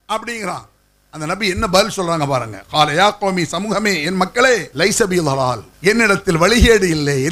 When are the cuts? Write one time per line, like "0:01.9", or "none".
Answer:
0:04.7
0:05.7